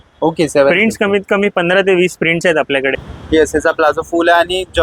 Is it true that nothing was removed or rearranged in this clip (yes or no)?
no